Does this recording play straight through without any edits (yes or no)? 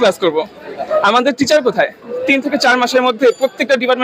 no